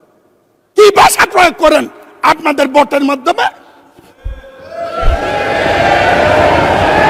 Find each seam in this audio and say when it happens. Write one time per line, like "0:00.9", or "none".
none